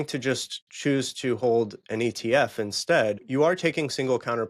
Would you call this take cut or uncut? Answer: cut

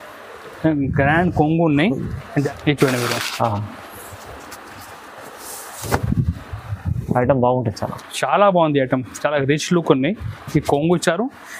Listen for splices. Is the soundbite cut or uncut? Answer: cut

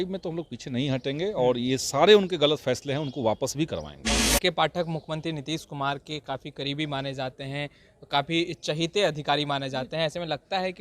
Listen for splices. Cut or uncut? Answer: cut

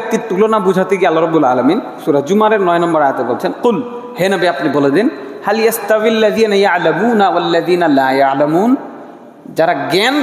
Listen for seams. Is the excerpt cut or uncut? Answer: uncut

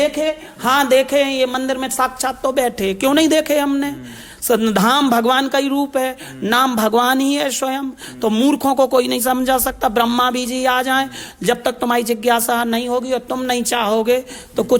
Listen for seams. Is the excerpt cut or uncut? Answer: uncut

